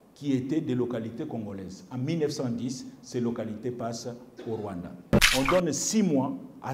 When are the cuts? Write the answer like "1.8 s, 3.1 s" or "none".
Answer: 5.1 s